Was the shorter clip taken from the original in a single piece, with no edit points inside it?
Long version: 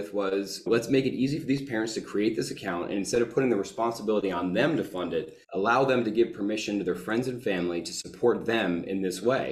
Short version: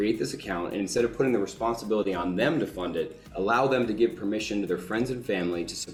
yes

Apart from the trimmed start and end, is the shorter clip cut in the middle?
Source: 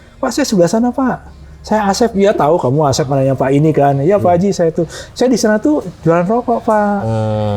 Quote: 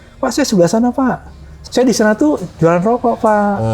yes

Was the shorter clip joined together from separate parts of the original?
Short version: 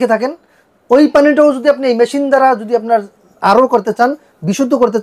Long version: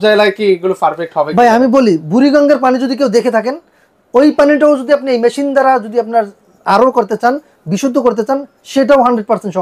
no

